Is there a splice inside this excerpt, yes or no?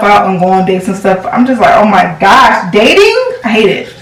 no